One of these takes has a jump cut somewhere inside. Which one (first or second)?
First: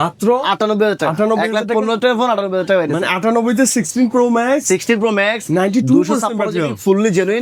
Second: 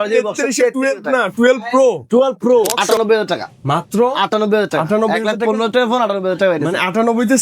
second